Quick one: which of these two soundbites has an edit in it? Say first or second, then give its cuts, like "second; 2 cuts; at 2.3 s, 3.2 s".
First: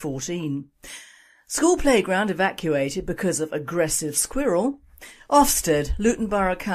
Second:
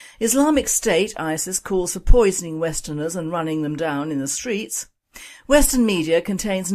second; 1 cut; at 3.5 s